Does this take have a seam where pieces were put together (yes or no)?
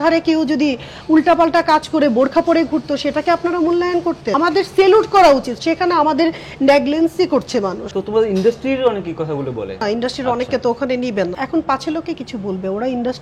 yes